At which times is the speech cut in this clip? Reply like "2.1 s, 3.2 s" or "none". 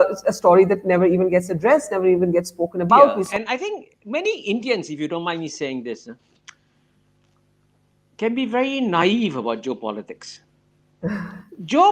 3.2 s